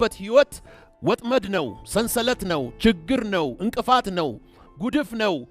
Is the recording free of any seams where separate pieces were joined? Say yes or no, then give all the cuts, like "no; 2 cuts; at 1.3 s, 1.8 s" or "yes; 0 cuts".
yes; 0 cuts